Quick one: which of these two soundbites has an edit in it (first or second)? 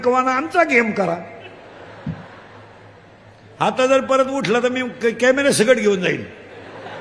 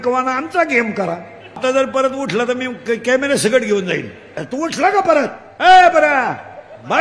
second